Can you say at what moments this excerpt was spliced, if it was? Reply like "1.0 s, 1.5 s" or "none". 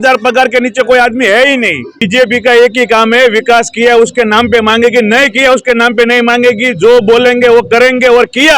2.0 s